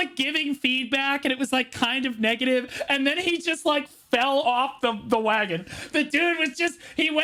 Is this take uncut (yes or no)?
yes